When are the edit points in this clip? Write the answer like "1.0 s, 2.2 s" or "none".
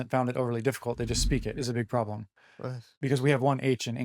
1.5 s